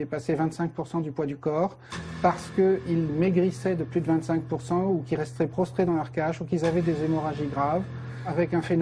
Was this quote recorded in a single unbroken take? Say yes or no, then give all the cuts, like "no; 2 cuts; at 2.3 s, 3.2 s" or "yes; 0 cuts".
yes; 0 cuts